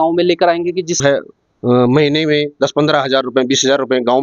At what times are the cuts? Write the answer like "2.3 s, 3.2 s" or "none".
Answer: 1.0 s